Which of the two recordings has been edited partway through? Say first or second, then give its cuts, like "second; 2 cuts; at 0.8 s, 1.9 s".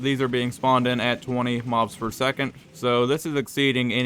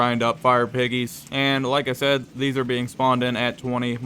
second; 1 cut; at 1.2 s